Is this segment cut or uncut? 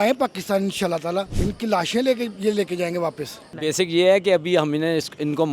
cut